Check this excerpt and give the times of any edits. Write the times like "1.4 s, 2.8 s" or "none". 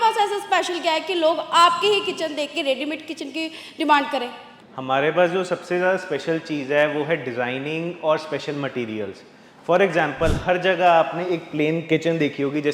none